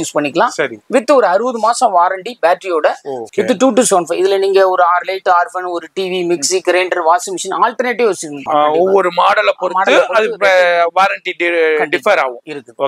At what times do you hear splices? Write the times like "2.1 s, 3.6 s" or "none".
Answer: 3.2 s, 8.5 s